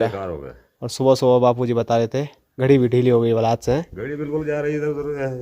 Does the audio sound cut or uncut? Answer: uncut